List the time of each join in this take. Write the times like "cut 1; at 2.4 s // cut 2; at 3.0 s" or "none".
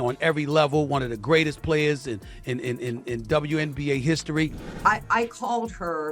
cut 1; at 4.7 s